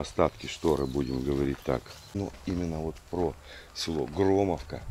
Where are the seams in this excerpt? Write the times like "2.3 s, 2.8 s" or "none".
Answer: 2.1 s